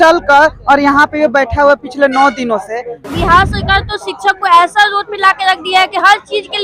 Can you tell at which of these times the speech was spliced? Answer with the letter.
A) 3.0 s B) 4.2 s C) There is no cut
A